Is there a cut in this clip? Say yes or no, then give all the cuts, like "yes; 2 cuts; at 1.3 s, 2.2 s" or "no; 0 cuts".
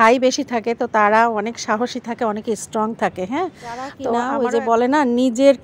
yes; 1 cut; at 4.2 s